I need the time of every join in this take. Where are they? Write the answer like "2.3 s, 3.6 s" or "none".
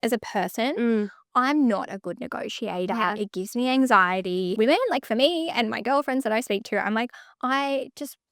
4.5 s